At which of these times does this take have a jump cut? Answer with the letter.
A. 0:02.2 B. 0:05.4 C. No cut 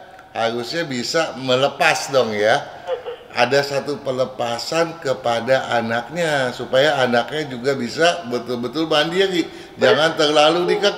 C